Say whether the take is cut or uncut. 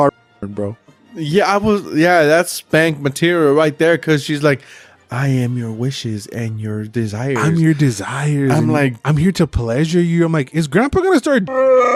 uncut